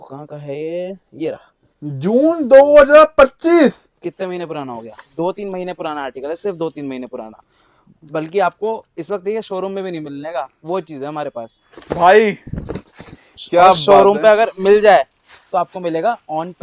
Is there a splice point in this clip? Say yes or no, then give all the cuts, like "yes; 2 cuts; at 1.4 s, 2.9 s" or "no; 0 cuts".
no; 0 cuts